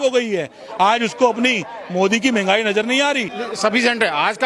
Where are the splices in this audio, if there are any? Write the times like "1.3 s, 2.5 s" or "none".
3.3 s

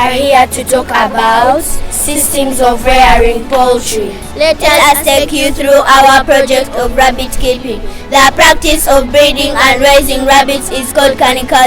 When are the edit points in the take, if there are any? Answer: 4.2 s

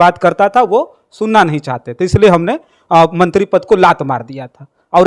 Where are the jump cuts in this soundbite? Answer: none

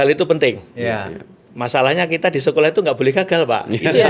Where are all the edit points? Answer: none

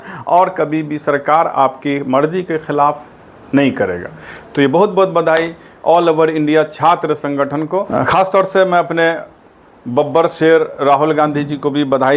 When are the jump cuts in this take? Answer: none

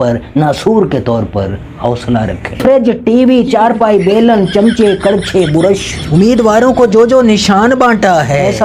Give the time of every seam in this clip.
2.6 s

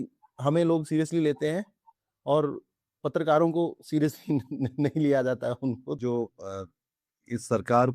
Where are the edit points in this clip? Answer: 6.0 s

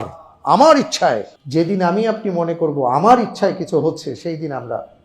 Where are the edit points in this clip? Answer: 1.3 s

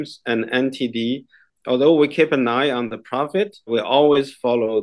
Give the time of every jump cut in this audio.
1.4 s, 3.7 s

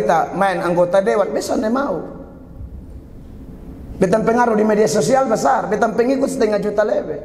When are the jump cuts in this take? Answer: none

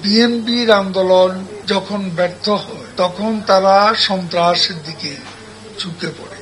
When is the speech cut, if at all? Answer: 1.5 s, 2.8 s

